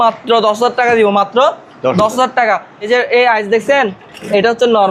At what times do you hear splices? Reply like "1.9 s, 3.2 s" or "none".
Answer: 2.9 s